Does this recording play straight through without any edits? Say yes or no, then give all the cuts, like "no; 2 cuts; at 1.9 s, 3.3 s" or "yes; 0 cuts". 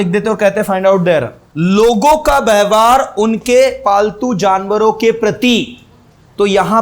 no; 1 cut; at 1.4 s